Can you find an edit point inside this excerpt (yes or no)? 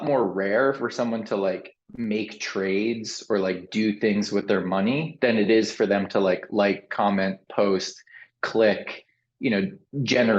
no